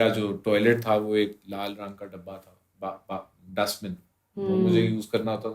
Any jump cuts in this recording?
no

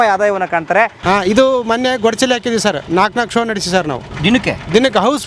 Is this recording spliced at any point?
yes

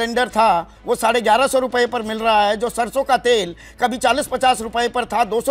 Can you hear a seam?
no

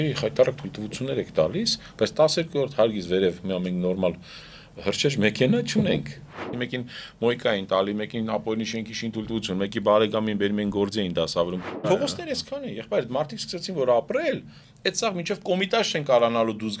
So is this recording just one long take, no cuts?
no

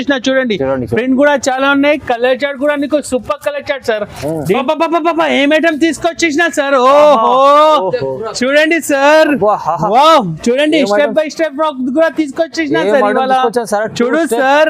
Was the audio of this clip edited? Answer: yes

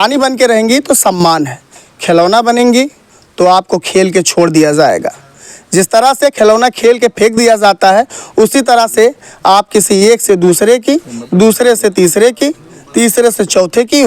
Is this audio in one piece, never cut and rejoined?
yes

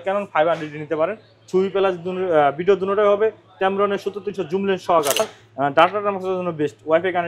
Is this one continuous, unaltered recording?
no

